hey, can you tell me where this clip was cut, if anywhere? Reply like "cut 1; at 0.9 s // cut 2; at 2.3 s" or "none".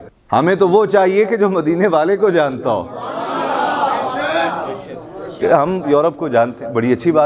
none